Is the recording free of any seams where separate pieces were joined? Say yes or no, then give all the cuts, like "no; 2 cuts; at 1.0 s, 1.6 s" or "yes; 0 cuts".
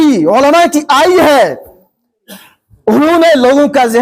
yes; 0 cuts